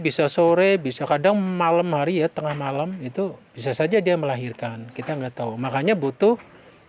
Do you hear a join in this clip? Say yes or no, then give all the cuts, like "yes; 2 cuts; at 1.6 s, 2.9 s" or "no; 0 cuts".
no; 0 cuts